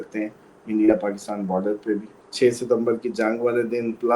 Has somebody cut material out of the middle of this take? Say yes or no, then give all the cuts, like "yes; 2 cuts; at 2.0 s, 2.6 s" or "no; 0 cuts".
yes; 1 cut; at 2.2 s